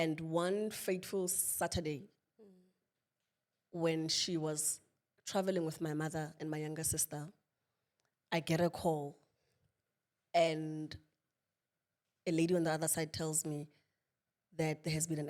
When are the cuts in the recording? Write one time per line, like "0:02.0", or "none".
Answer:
none